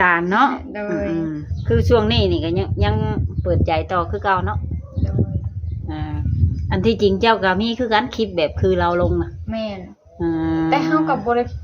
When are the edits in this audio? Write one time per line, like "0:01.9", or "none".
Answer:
0:01.5
0:06.2